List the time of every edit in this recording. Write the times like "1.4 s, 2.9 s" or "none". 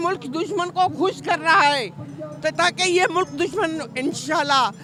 none

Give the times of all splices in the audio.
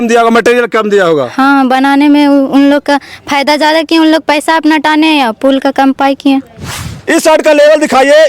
6.9 s

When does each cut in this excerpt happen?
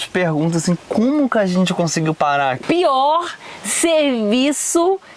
2.6 s

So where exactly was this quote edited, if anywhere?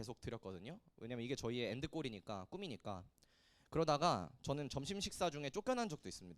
none

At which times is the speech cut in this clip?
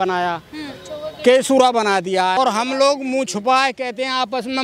2.4 s

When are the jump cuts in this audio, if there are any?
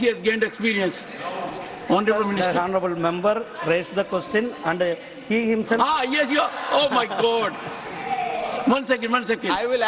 none

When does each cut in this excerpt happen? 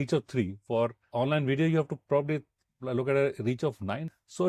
1.1 s

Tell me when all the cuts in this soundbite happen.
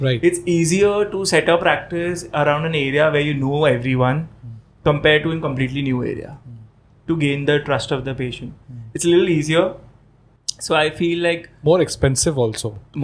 none

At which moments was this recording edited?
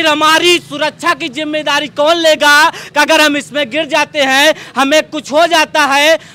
none

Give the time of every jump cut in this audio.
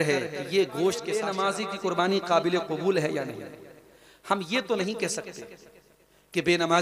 1.3 s

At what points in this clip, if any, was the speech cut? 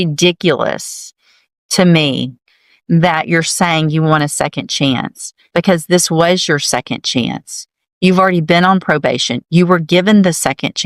none

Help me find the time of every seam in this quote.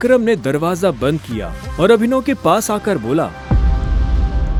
none

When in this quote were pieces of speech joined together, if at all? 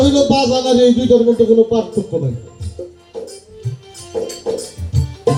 none

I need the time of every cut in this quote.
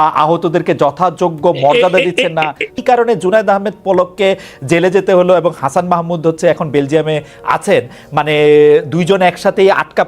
2.8 s

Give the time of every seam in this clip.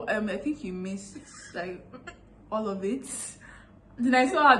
none

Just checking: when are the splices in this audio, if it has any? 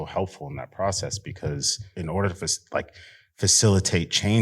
1.9 s

